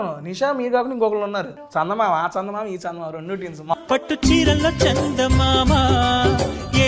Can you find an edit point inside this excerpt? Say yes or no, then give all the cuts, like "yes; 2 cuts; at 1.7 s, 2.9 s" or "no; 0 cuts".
yes; 2 cuts; at 1.6 s, 3.7 s